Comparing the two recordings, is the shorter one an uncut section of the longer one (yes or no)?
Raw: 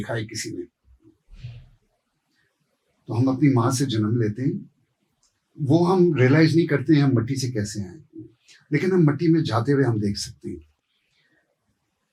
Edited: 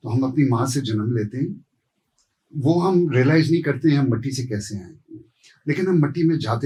yes